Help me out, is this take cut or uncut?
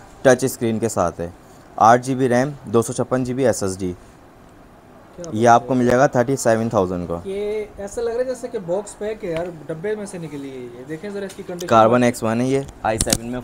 uncut